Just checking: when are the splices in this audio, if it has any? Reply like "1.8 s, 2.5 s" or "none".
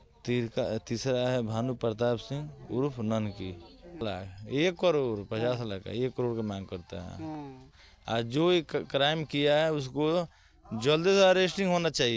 4.0 s